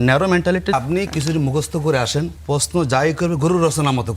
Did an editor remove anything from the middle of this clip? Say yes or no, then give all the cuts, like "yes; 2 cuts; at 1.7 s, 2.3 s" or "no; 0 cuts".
yes; 2 cuts; at 0.7 s, 2.4 s